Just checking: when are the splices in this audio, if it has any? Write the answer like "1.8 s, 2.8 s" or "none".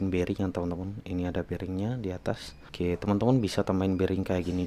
2.6 s